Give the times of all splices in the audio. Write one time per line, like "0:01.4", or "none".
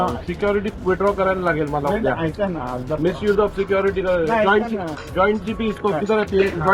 none